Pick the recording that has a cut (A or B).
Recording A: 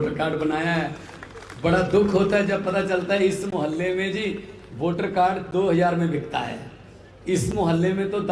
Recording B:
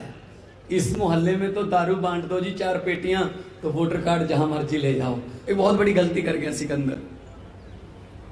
B